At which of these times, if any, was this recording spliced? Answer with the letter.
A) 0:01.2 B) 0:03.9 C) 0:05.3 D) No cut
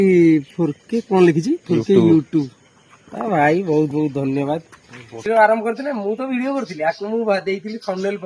C